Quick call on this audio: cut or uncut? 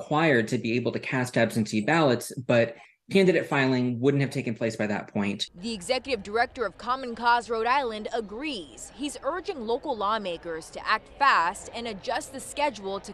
uncut